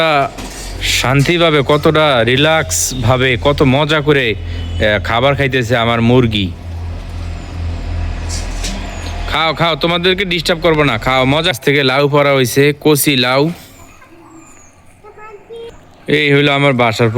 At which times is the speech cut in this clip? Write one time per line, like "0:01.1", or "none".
0:11.5

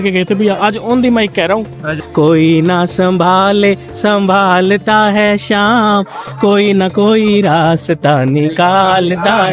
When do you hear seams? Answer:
0:02.0

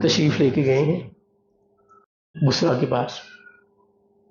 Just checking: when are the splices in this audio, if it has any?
0:02.4

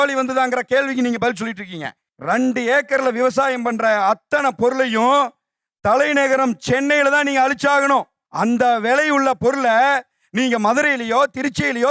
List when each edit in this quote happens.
none

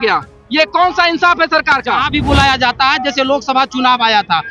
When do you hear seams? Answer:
0:02.0

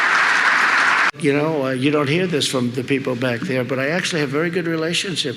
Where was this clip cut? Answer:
0:01.1

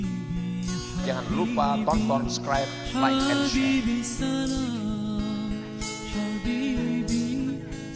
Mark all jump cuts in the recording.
none

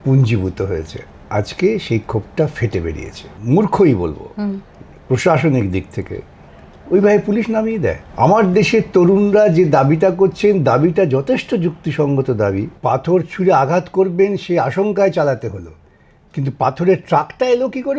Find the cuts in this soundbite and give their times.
0:03.3
0:08.0
0:12.7

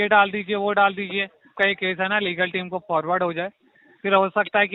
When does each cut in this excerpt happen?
0:01.5

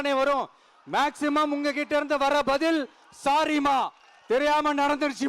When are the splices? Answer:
0:04.1

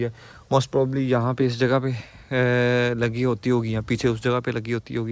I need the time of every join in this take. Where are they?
none

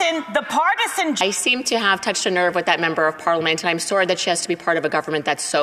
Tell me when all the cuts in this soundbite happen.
0:01.2

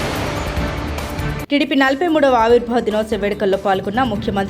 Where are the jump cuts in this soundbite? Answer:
0:01.2

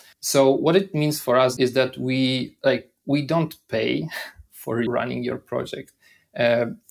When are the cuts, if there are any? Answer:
0:01.5
0:04.9

